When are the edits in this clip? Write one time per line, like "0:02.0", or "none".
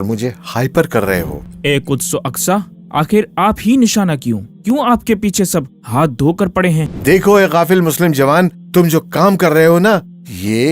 0:01.4
0:06.9